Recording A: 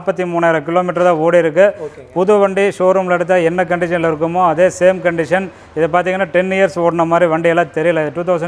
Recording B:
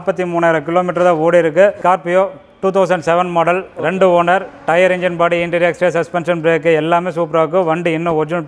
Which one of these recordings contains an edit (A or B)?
B